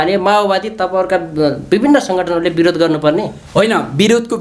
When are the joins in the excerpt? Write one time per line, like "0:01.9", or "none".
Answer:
none